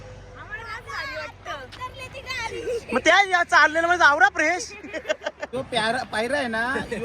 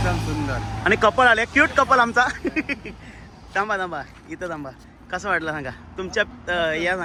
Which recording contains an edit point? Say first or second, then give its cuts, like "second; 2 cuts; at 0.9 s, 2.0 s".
first; 1 cut; at 5.4 s